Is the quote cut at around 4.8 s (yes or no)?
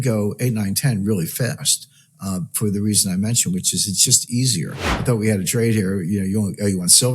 yes